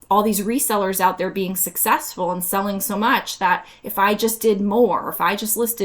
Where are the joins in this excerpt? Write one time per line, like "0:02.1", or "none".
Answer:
none